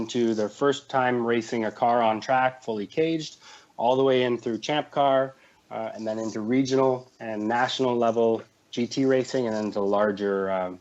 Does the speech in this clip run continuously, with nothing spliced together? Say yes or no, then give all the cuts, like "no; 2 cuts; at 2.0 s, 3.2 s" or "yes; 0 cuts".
yes; 0 cuts